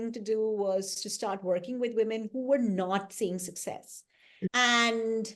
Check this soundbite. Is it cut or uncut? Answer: uncut